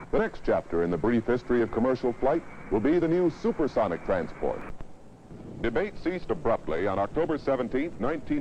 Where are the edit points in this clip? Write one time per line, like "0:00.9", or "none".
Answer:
0:06.6